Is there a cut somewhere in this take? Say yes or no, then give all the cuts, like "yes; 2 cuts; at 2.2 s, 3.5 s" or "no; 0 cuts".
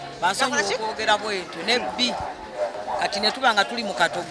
yes; 1 cut; at 2.8 s